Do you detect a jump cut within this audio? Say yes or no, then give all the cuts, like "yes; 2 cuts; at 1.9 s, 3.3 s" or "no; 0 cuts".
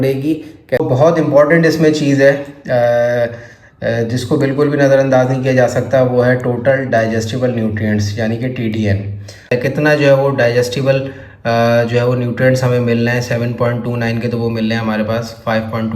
yes; 2 cuts; at 0.8 s, 9.5 s